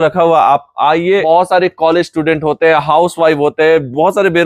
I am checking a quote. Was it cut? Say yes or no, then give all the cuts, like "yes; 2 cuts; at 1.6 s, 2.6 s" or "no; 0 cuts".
yes; 1 cut; at 1.2 s